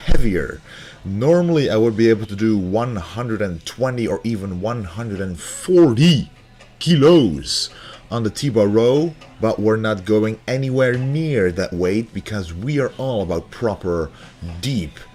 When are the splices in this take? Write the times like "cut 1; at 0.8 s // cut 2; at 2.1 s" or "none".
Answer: none